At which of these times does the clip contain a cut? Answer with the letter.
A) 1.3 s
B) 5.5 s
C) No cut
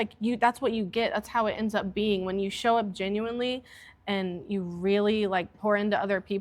B